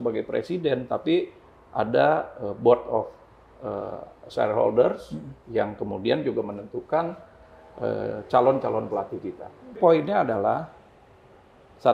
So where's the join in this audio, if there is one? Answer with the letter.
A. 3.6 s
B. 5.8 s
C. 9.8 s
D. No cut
C